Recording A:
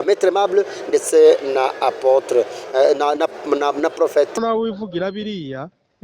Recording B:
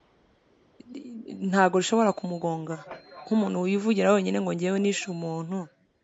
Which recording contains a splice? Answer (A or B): A